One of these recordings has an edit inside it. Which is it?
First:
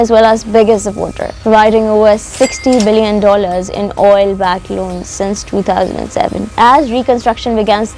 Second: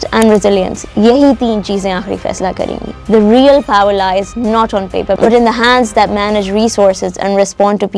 first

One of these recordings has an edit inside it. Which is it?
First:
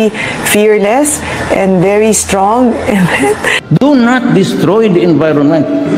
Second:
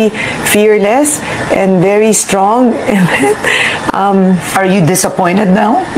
first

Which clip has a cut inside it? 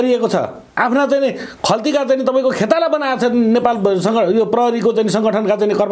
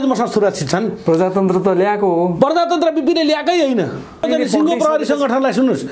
second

